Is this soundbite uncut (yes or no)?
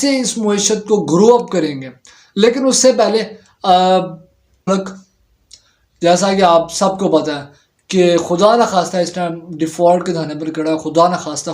no